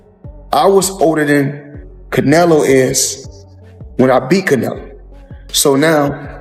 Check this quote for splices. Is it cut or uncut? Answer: uncut